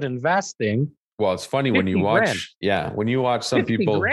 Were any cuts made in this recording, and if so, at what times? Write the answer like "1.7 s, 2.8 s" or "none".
1.0 s, 2.5 s

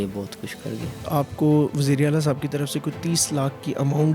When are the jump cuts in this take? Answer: 1.1 s

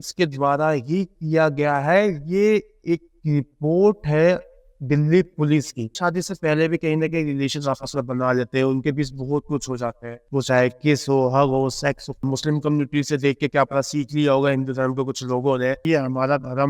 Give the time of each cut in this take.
6.0 s, 12.2 s, 15.8 s

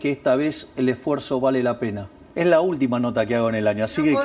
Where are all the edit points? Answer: 2.2 s

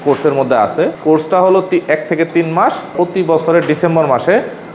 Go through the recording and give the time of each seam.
1.0 s, 2.9 s

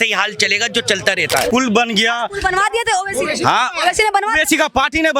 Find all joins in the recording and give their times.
1.5 s

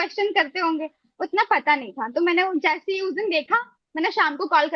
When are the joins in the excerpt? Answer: none

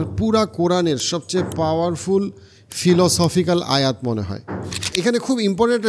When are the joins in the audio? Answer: 4.9 s

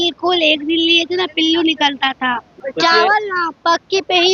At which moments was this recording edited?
2.6 s

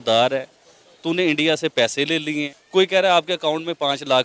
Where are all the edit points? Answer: 2.6 s

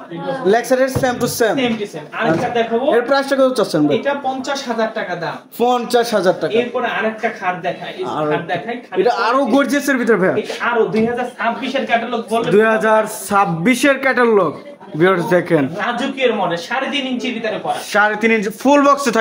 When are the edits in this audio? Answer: none

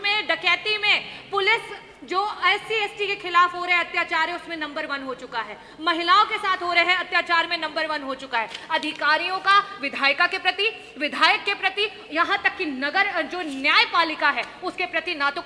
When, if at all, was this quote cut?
none

